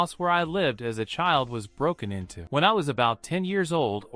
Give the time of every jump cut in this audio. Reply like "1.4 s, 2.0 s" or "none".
2.3 s

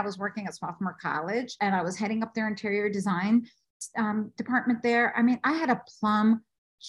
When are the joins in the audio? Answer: 1.5 s

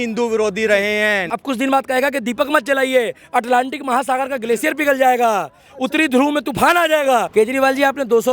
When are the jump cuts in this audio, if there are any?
1.3 s, 7.3 s

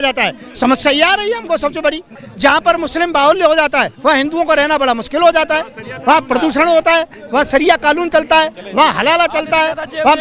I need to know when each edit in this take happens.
2.2 s

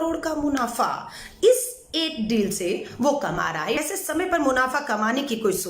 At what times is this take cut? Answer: 3.8 s

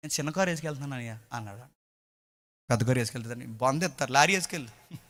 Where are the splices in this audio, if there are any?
none

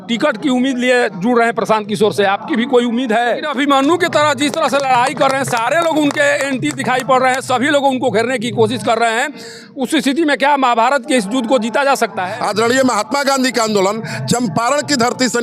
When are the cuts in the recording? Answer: 3.5 s, 12.2 s

